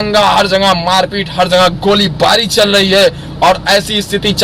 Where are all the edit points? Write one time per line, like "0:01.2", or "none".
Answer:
none